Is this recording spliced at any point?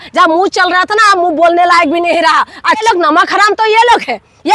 yes; 1 cut; at 2.8 s

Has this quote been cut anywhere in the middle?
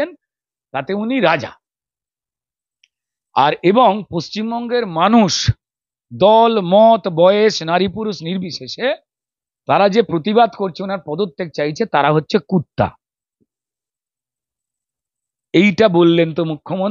no; 0 cuts

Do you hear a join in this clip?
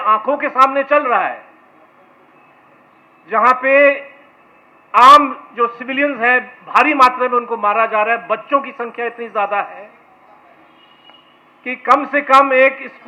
no; 0 cuts

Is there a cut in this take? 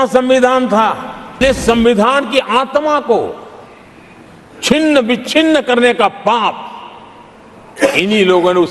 yes; 1 cut; at 1.4 s

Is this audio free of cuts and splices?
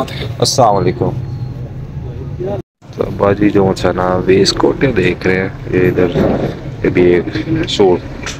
no; 1 cut; at 2.8 s

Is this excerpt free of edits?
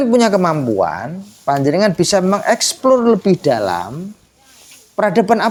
yes; 0 cuts

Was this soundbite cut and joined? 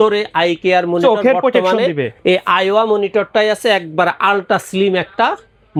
no; 0 cuts

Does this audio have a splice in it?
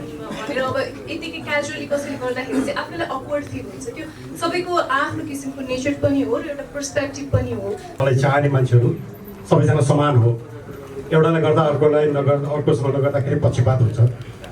yes; 1 cut; at 7.9 s

